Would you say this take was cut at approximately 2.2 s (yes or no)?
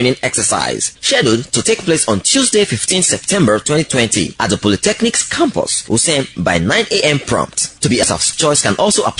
no